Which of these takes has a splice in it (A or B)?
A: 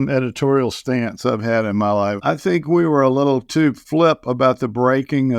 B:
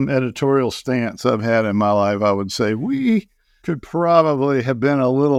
A